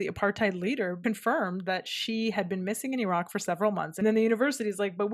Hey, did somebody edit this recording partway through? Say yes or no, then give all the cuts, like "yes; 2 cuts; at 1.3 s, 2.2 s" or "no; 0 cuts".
yes; 2 cuts; at 1.0 s, 4.0 s